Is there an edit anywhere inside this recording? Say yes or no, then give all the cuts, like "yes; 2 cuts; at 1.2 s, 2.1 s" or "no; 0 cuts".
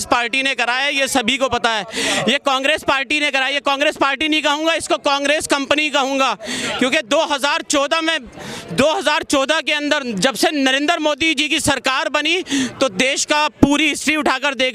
no; 0 cuts